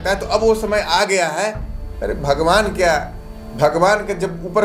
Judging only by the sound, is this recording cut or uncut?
uncut